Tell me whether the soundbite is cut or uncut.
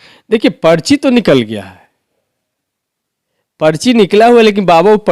uncut